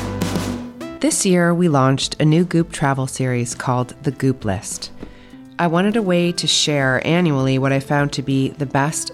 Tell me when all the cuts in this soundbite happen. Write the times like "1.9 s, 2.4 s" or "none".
0.9 s